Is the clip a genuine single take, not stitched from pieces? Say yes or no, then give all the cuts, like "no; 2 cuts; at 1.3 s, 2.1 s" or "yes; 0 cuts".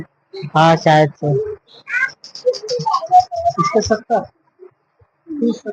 yes; 0 cuts